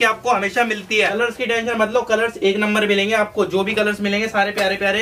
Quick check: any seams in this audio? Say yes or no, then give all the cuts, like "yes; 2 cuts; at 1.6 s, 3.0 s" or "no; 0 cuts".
yes; 1 cut; at 1.2 s